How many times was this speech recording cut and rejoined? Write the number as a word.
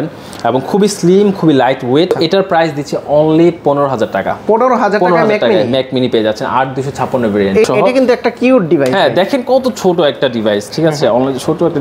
two